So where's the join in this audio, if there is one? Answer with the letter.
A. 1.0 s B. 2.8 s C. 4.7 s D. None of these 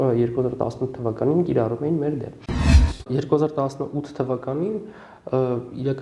B